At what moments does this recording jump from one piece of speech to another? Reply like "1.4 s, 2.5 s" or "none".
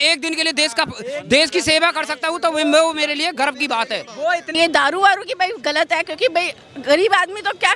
4.5 s